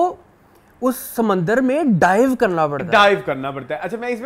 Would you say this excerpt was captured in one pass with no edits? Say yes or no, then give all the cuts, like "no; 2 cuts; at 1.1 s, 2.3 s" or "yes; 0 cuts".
yes; 0 cuts